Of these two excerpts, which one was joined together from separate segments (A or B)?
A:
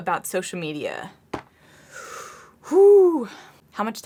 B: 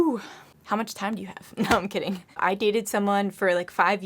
B